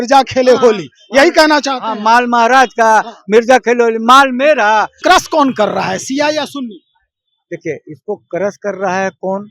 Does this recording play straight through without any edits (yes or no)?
no